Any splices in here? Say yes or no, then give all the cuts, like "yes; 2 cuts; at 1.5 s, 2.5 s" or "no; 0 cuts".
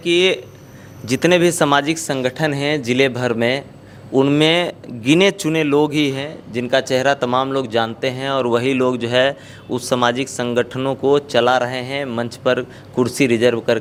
no; 0 cuts